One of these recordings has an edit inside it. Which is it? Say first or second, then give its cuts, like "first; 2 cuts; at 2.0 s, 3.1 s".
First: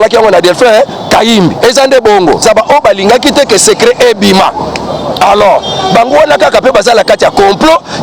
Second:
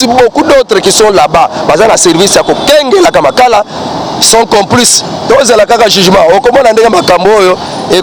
first; 1 cut; at 2.4 s